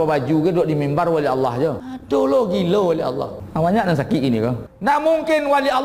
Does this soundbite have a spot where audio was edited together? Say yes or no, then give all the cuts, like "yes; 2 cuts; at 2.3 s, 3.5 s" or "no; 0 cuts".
yes; 3 cuts; at 1.9 s, 3.4 s, 4.7 s